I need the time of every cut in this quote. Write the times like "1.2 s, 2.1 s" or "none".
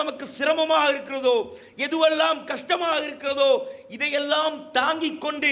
none